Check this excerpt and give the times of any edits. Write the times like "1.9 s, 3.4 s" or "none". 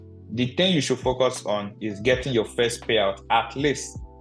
none